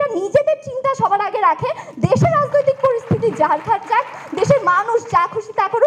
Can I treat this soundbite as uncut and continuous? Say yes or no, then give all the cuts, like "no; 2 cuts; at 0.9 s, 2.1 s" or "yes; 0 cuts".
yes; 0 cuts